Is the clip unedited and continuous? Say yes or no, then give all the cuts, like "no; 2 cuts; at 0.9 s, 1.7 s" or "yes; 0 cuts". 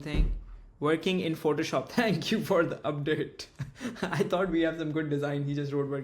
yes; 0 cuts